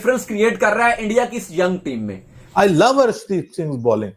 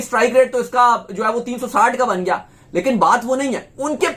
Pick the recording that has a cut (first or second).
first